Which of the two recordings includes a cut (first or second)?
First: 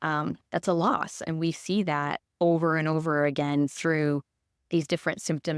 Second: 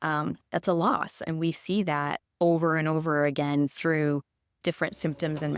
second